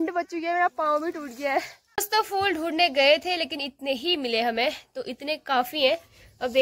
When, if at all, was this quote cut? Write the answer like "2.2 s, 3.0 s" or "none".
1.8 s